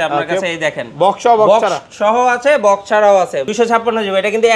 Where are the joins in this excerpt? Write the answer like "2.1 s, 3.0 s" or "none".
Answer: 3.5 s

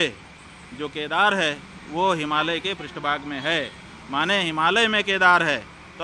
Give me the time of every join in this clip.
none

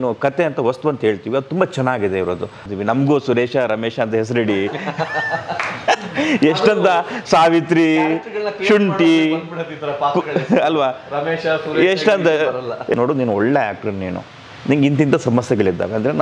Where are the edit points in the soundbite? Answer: 2.6 s, 12.9 s

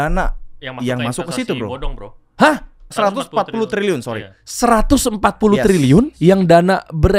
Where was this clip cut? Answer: 3.1 s, 6.1 s

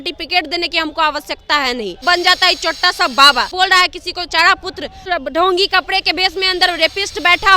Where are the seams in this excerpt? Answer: 2.0 s, 3.5 s, 5.0 s

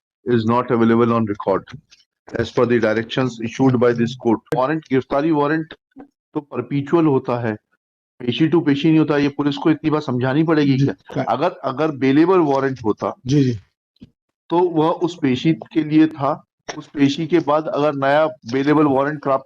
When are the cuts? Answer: 4.5 s

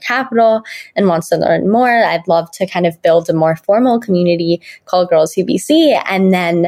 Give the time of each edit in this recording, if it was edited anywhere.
none

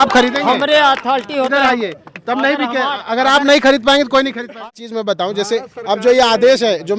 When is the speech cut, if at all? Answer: 4.6 s

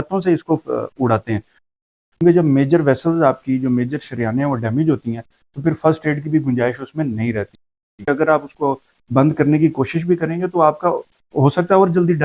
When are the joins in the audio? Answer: 1.6 s, 7.9 s

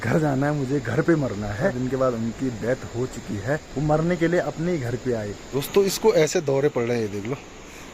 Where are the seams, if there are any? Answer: 1.8 s, 3.7 s, 5.4 s

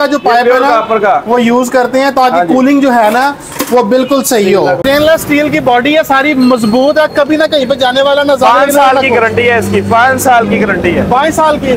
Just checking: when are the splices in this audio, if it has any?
4.8 s

